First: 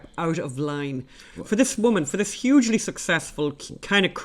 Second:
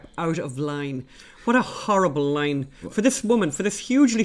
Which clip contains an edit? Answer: first; 1 cut; at 1.3 s

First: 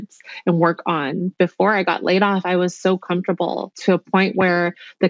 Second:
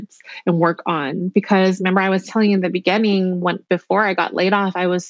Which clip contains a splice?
first; 2 cuts; at 1.3 s, 3.7 s

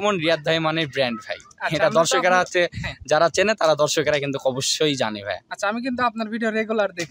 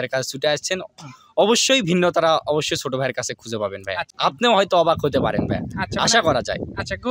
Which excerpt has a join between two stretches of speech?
second; 1 cut; at 4.1 s

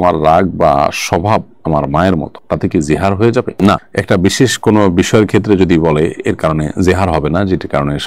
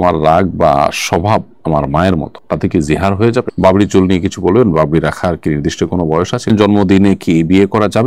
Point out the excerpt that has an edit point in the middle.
second; 2 cuts; at 3.5 s, 6.5 s

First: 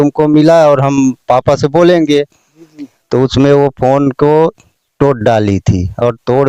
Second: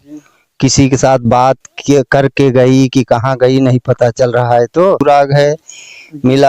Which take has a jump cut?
second; 1 cut; at 5.0 s

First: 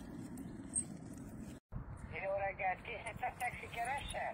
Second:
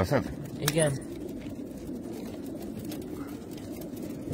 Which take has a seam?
first; 1 cut; at 1.6 s

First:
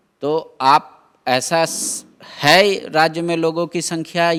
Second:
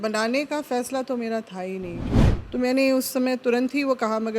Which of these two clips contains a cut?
second; 1 cut; at 2.0 s

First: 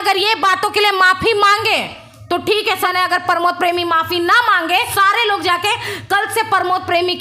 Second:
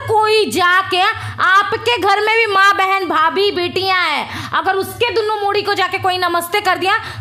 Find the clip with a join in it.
first; 2 cuts; at 2.9 s, 4.9 s

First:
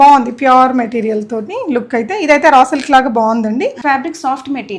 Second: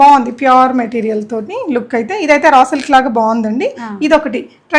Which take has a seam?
first; 1 cut; at 3.8 s

